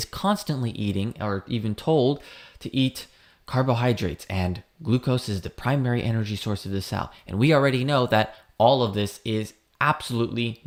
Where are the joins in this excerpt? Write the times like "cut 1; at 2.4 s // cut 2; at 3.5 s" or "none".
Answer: none